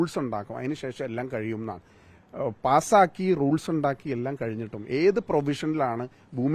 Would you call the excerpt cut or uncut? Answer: uncut